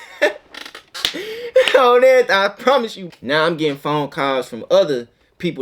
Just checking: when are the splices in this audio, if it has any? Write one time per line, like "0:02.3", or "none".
0:03.0